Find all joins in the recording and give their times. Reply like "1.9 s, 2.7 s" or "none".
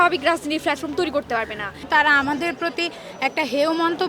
1.7 s